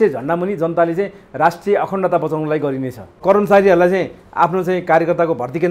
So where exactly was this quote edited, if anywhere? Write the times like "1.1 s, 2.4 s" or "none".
3.1 s